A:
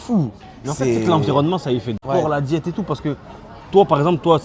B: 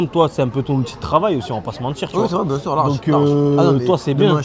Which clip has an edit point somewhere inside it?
A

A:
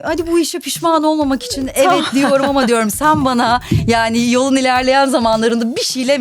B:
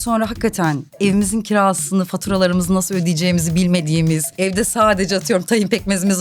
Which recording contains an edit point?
B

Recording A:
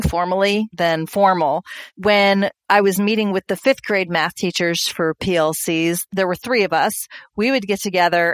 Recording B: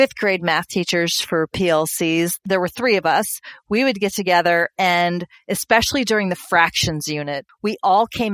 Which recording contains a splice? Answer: B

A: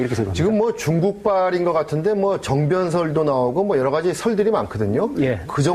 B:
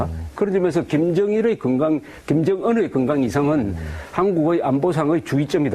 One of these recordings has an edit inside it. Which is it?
B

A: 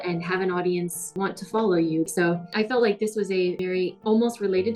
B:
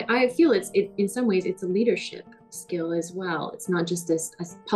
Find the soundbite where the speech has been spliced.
A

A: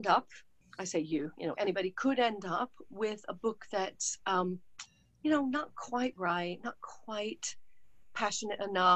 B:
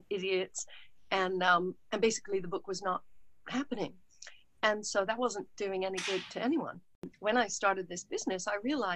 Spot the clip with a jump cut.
B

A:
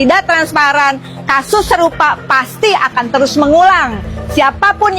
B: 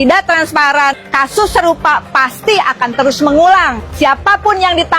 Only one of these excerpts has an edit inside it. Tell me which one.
B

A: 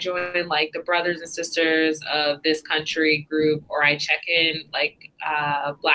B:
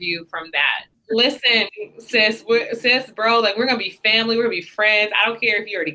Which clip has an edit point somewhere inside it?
B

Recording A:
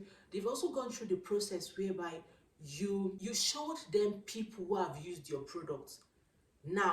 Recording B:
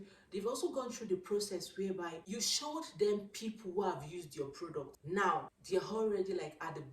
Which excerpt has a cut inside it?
B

